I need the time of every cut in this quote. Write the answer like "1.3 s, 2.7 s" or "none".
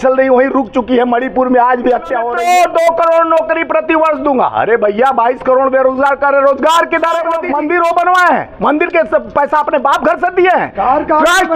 2.2 s, 7.3 s